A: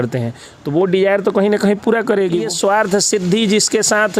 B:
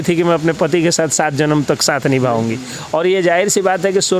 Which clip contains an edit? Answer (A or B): A